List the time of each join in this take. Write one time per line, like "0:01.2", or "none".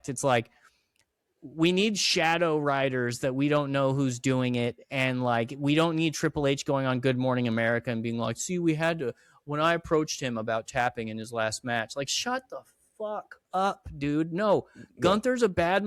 none